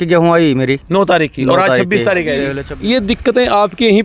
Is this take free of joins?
no; 1 cut; at 2.6 s

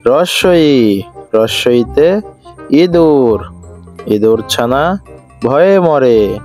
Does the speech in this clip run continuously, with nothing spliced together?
yes; 0 cuts

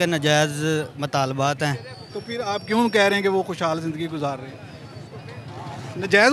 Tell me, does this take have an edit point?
no; 0 cuts

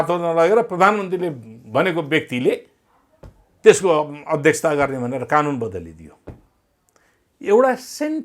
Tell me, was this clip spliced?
no; 0 cuts

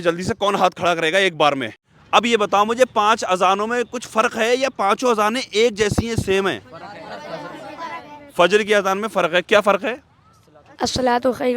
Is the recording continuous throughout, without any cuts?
no; 1 cut; at 1.8 s

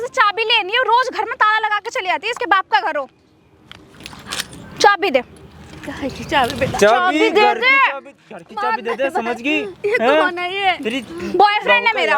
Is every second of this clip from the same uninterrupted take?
yes; 0 cuts

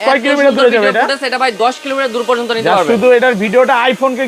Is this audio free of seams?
yes; 0 cuts

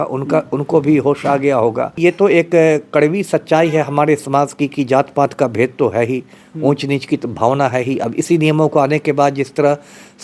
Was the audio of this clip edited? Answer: yes; 1 cut; at 2.0 s

